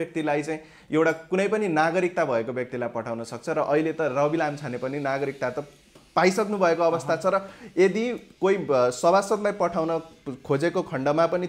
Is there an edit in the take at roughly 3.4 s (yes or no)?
no